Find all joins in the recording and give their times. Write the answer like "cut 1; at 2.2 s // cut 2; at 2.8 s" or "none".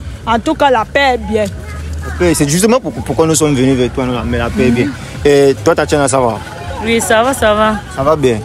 none